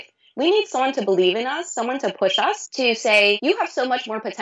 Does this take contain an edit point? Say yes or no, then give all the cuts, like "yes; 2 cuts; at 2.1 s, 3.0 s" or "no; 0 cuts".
yes; 2 cuts; at 2.7 s, 3.4 s